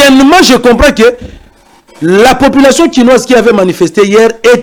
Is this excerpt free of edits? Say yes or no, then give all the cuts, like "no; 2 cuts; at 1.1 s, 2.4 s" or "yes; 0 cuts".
yes; 0 cuts